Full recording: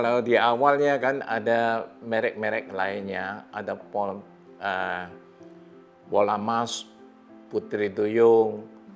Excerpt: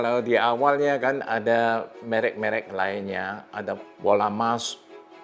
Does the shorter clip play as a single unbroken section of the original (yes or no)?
no